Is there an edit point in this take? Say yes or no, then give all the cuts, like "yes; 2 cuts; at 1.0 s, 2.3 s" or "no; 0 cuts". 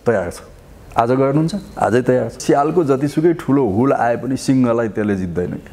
yes; 1 cut; at 2.4 s